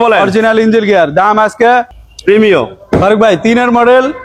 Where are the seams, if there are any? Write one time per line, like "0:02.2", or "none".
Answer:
0:02.0

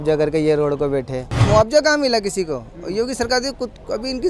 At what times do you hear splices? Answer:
0:01.4

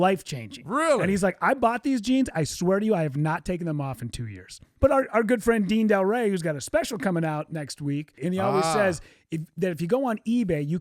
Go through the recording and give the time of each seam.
0:04.6
0:08.1

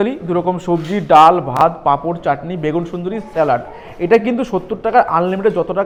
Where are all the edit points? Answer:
none

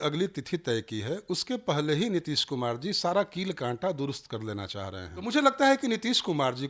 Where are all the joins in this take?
0:05.3

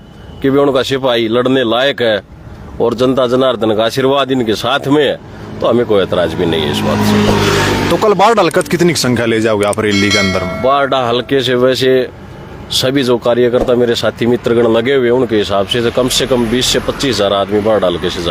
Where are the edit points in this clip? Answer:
none

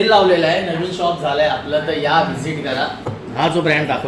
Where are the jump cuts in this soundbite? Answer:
0:03.1

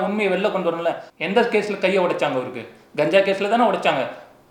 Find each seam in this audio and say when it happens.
0:01.1

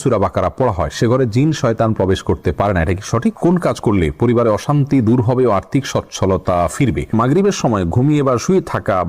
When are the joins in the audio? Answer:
0:03.4
0:07.1

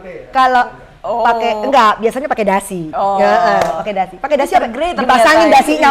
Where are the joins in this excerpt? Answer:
none

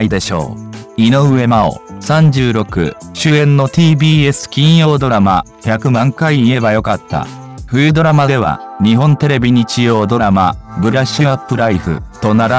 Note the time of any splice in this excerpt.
0:01.1

